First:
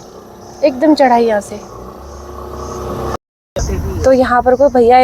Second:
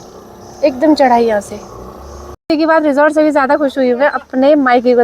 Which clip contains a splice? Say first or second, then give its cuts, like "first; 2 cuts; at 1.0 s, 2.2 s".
second; 1 cut; at 2.5 s